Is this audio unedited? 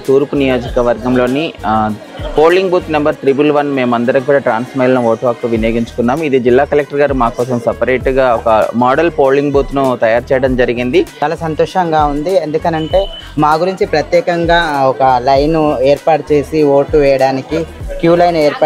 no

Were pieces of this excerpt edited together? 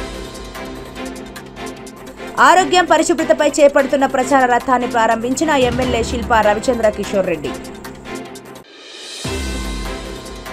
yes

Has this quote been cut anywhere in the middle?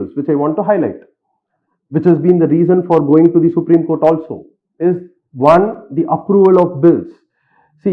no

